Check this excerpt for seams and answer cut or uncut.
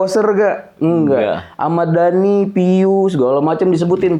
uncut